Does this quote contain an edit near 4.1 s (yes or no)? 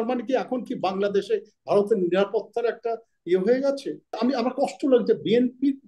yes